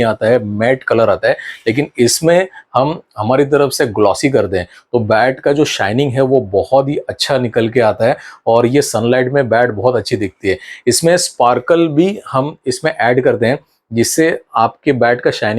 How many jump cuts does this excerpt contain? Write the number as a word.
zero